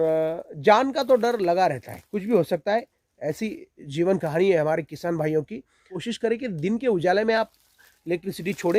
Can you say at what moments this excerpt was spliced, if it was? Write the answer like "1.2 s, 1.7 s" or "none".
6.0 s